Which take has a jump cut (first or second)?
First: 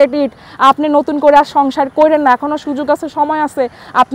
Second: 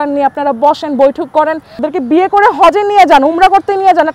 second